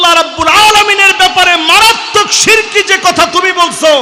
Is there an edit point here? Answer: no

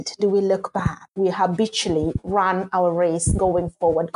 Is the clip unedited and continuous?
no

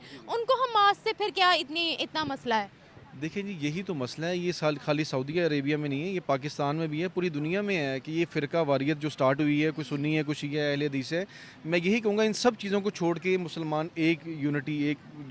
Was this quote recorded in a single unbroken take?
yes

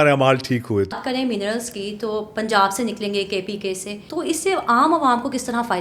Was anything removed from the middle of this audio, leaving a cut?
yes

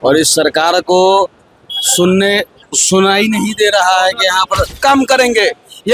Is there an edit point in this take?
yes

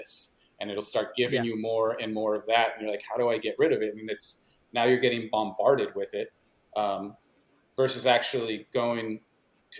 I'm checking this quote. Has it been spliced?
no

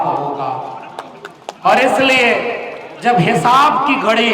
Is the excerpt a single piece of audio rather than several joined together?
yes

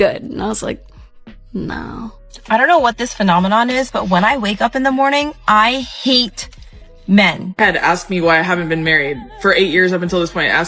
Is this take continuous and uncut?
no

